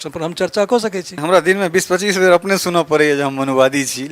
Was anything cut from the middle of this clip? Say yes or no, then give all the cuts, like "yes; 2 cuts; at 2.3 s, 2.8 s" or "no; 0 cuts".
yes; 1 cut; at 1.1 s